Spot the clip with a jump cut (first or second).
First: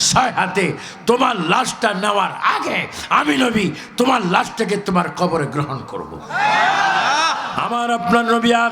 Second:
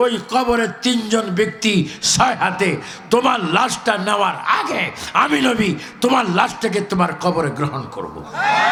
first